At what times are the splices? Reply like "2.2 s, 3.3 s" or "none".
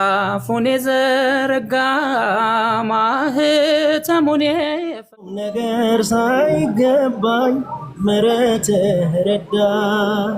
5.2 s